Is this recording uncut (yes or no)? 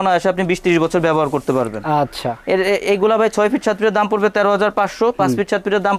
yes